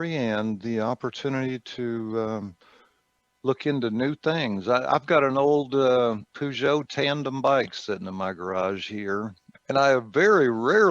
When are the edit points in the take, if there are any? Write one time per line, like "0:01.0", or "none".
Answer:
0:09.5